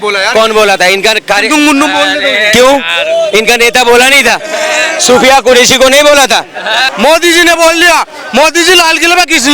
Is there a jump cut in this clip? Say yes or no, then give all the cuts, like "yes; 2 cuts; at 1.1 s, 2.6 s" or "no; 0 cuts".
yes; 1 cut; at 6.8 s